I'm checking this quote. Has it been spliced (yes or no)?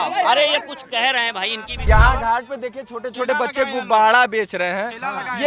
yes